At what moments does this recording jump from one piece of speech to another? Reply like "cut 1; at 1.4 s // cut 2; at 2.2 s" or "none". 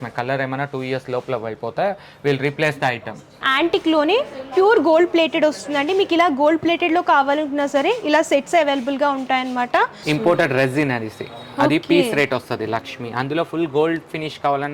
cut 1; at 3.5 s // cut 2; at 10.0 s